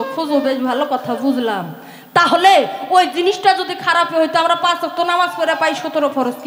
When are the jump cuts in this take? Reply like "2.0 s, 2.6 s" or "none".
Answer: none

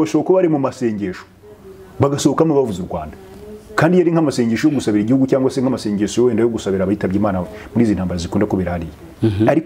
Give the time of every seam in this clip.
none

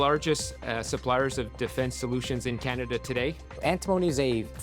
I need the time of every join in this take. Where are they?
3.5 s

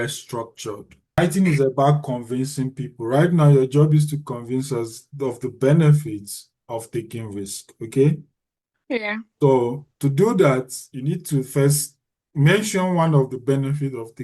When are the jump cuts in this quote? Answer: 1.2 s

